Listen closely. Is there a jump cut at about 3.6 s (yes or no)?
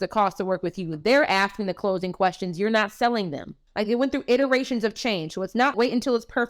yes